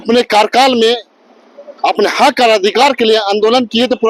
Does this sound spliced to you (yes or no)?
no